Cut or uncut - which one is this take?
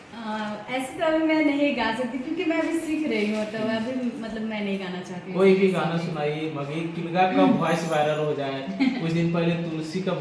uncut